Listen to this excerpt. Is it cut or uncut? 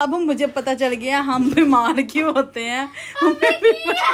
uncut